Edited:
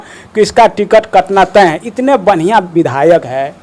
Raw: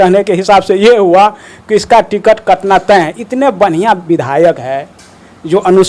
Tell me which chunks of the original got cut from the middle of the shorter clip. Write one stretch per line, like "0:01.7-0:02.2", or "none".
none